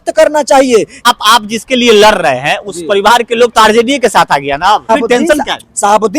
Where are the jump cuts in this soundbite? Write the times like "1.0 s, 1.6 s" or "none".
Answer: 1.0 s, 4.9 s